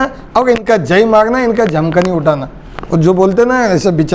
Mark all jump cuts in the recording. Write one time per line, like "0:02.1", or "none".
none